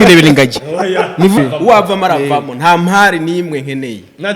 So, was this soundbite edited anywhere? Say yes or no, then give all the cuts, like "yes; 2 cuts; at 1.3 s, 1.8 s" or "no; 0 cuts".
yes; 1 cut; at 1.4 s